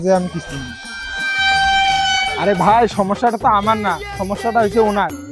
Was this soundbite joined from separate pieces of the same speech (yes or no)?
yes